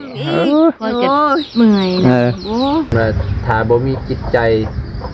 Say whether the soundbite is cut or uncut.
cut